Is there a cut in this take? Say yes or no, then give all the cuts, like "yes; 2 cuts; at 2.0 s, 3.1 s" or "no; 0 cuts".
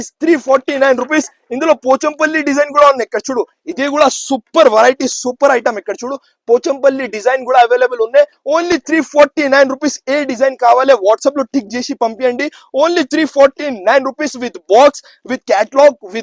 no; 0 cuts